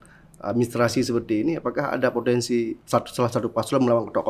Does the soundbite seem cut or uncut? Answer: cut